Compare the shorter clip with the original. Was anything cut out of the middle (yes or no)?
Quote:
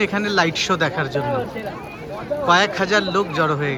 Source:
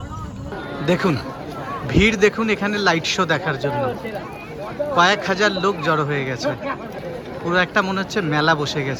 no